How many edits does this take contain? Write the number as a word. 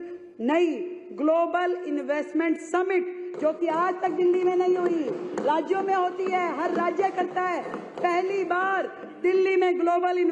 zero